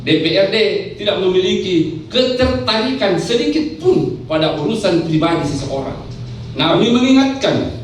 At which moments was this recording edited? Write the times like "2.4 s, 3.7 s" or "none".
6.7 s